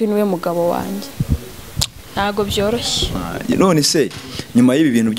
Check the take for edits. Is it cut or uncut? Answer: cut